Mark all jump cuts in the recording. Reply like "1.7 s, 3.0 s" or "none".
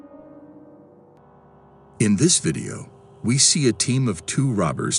1.2 s